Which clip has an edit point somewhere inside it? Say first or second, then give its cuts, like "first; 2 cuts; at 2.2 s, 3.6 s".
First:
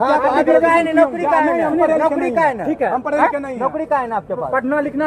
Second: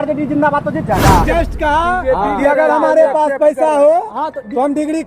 second; 1 cut; at 1.2 s